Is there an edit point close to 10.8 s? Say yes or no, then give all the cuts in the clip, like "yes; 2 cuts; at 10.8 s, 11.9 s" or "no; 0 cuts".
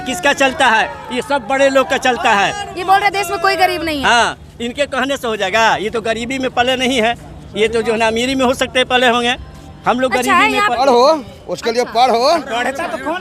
yes; 1 cut; at 10.8 s